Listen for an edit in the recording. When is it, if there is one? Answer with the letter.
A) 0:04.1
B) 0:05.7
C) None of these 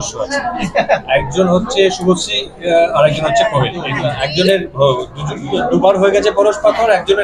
A